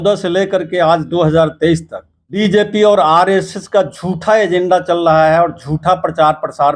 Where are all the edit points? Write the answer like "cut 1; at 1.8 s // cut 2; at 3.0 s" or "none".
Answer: cut 1; at 2.3 s